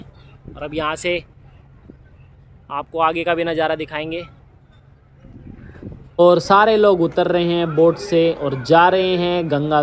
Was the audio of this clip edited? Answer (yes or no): no